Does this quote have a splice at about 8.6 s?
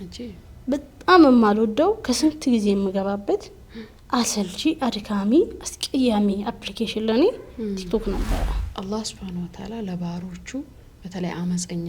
yes; 1 cut; at 8.6 s

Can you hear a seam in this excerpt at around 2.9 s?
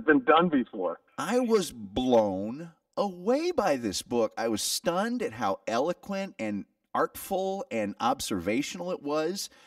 no; 1 cut; at 1.1 s

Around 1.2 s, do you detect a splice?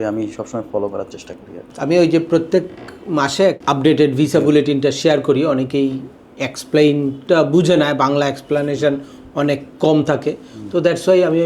no; 1 cut; at 3.6 s

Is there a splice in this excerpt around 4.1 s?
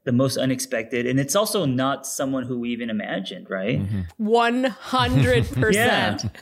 yes; 1 cut; at 4.1 s

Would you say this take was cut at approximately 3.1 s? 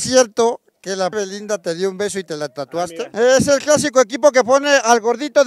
yes; 2 cuts; at 1.1 s, 3.1 s

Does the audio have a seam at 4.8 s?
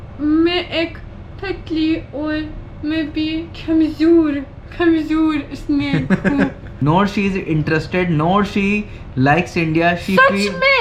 no; 1 cut; at 6.7 s

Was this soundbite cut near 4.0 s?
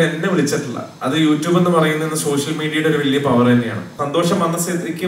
yes; 1 cut; at 4.0 s

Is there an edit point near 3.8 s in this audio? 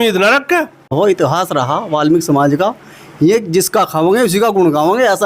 no; 1 cut; at 0.9 s

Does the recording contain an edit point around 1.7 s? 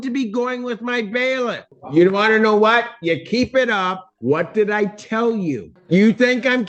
yes; 3 cuts; at 1.7 s, 4.0 s, 5.7 s

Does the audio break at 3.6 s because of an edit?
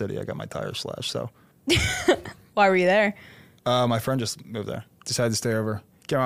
no; 2 cuts; at 1.5 s, 5.0 s

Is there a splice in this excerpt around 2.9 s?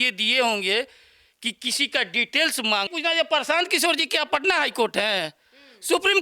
yes; 1 cut; at 2.9 s

